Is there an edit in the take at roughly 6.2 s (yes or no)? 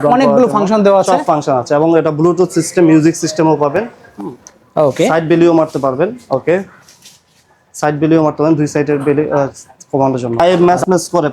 no